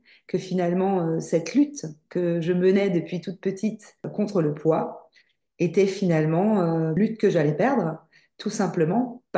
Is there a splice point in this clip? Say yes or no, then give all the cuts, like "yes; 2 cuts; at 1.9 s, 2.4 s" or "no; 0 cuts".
yes; 2 cuts; at 4.1 s, 7.0 s